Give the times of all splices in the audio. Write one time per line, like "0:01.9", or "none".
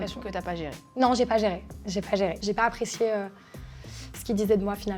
0:02.4